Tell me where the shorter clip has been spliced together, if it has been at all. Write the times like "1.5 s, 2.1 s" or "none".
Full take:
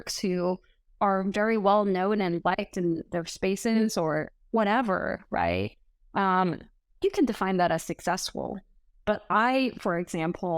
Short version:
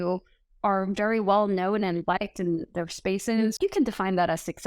3.6 s